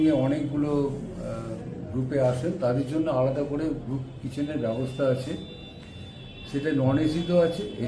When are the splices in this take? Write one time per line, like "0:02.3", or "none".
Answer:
none